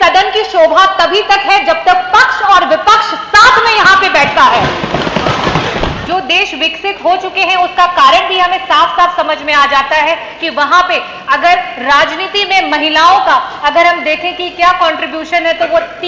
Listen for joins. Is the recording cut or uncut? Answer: cut